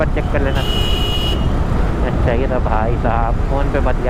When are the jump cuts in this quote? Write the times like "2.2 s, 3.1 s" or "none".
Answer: none